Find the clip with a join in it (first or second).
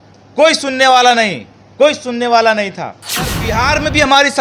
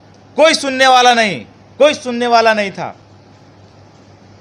first